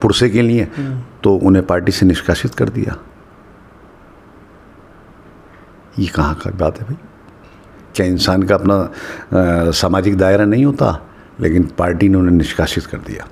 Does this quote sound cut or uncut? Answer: uncut